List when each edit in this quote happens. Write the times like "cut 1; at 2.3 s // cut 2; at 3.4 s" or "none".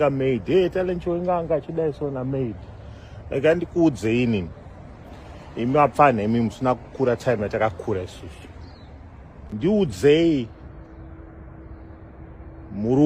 cut 1; at 9.5 s